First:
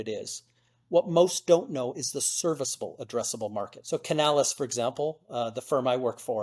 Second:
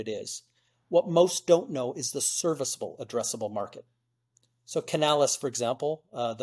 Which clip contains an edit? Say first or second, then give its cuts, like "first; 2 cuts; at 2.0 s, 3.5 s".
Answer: first; 1 cut; at 3.8 s